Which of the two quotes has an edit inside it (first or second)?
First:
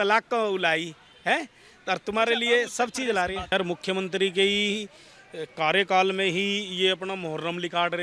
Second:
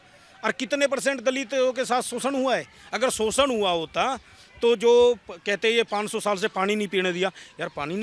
first